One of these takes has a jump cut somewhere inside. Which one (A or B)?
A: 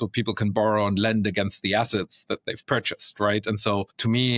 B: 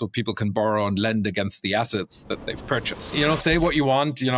B